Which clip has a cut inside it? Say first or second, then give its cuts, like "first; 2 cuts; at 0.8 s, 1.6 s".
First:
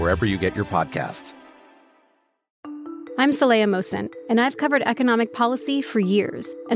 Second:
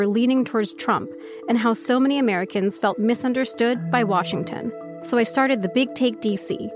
first; 1 cut; at 2.5 s